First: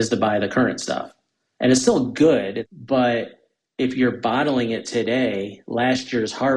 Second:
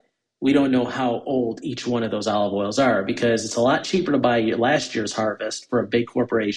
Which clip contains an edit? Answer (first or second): first